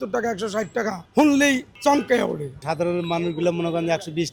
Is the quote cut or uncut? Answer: cut